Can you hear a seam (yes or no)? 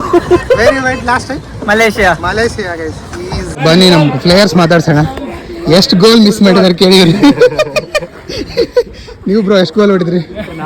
yes